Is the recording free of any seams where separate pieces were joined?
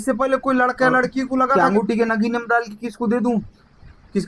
no; 1 cut; at 1.5 s

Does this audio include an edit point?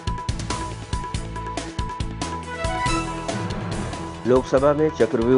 no; 0 cuts

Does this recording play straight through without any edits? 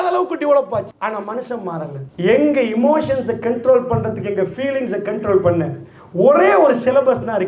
no; 1 cut; at 2.0 s

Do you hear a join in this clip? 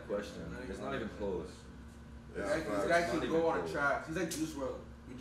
no; 0 cuts

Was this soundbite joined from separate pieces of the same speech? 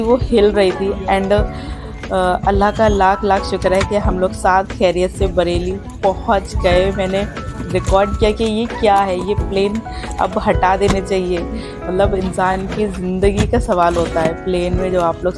no; 0 cuts

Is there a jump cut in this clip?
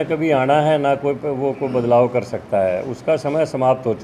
no; 0 cuts

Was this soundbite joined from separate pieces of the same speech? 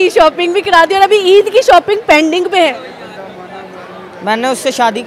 no; 0 cuts

